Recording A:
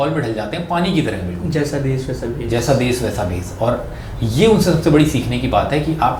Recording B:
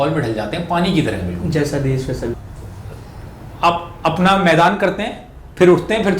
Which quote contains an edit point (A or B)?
B